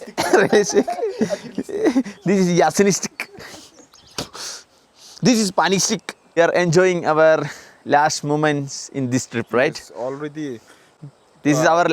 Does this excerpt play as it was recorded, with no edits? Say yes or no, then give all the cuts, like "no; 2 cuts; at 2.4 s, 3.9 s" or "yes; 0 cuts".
no; 1 cut; at 6.4 s